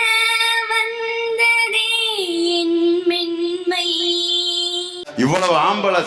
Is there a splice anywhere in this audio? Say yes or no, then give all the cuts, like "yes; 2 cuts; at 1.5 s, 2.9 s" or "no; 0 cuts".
yes; 1 cut; at 5.0 s